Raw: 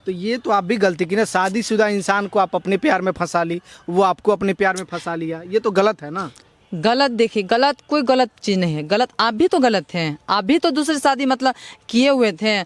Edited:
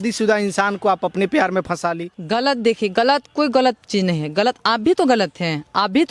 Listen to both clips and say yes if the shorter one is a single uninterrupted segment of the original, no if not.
no